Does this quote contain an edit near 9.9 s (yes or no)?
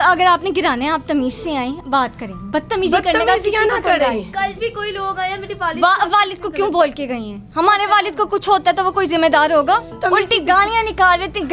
yes